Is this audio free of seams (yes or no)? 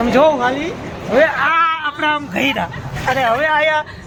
yes